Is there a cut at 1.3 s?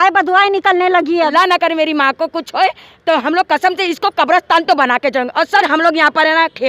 yes; 2 cuts; at 1.3 s, 5.7 s

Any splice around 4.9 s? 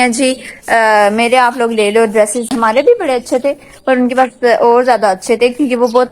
no; 1 cut; at 2.5 s

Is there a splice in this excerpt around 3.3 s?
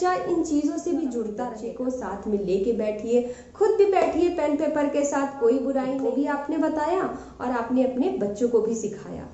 no; 2 cuts; at 1.5 s, 5.9 s

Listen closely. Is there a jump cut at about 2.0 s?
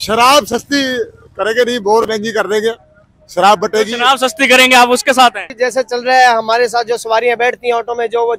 no; 1 cut; at 5.5 s

